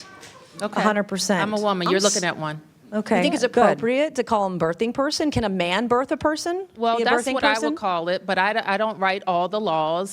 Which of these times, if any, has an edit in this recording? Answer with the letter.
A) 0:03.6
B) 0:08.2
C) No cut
A